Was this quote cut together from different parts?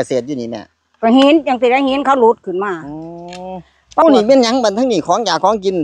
yes; 1 cut; at 4.0 s

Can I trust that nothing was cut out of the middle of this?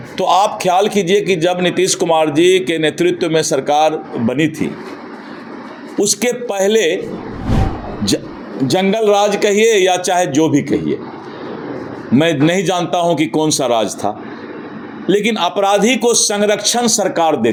yes; 0 cuts

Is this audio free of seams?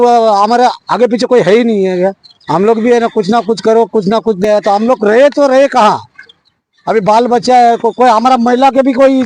no; 1 cut; at 4.4 s

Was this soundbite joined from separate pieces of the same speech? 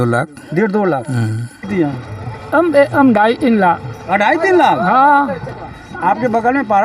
yes; 1 cut; at 1.7 s

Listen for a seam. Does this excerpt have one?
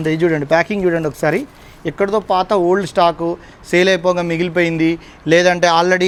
no; 0 cuts

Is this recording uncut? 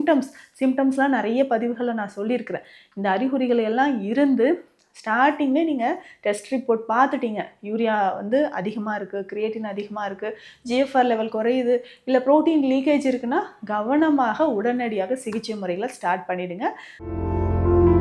no; 1 cut; at 16.9 s

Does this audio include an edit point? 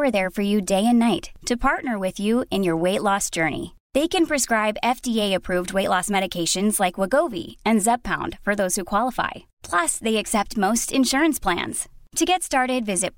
no; 0 cuts

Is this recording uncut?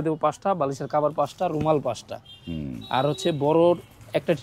yes; 0 cuts

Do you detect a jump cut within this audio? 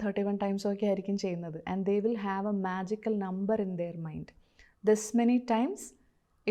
no; 0 cuts

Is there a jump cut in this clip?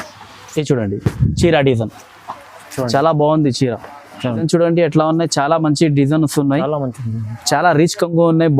yes; 1 cut; at 4.5 s

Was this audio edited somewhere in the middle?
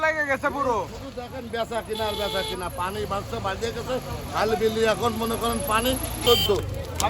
yes; 1 cut; at 6.2 s

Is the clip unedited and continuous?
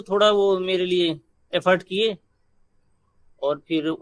yes; 0 cuts

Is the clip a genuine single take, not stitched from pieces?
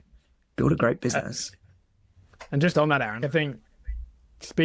yes; 0 cuts

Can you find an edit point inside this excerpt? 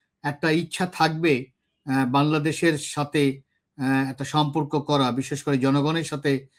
no; 0 cuts

